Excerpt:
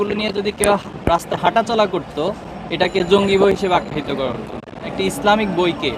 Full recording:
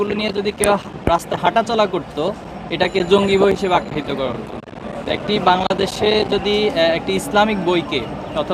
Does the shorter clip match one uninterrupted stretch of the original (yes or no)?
no